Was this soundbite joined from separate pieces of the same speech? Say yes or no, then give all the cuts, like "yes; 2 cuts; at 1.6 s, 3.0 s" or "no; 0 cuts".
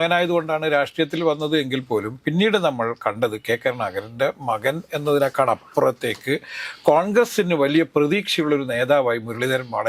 no; 0 cuts